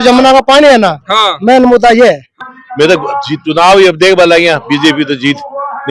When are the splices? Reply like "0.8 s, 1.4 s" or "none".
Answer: 2.3 s